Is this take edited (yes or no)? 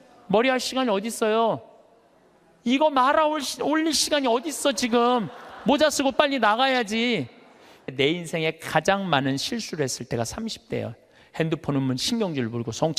yes